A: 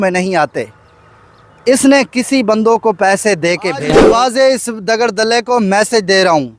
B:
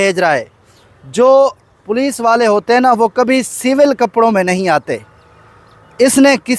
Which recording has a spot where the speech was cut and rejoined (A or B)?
A